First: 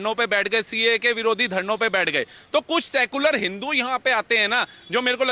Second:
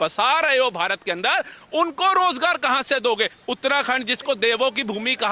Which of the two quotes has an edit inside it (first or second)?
second